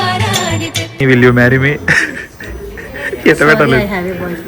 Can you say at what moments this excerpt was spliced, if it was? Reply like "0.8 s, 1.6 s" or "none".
1.0 s